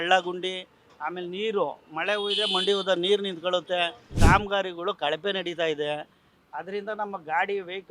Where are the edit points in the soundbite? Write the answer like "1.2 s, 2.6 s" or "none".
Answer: 4.2 s